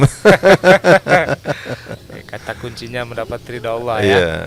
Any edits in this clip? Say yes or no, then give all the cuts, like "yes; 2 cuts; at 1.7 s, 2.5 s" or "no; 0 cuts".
no; 0 cuts